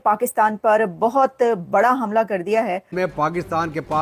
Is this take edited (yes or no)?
yes